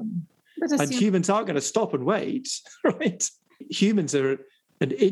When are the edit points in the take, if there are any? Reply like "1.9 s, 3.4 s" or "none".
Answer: 3.7 s